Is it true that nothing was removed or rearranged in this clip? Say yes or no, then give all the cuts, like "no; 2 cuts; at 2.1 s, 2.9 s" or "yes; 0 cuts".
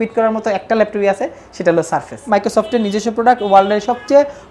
no; 1 cut; at 2.2 s